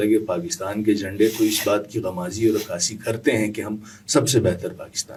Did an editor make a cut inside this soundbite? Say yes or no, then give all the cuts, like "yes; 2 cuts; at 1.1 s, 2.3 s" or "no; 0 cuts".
no; 0 cuts